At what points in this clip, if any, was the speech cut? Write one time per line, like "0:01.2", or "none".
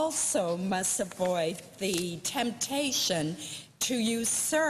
0:01.8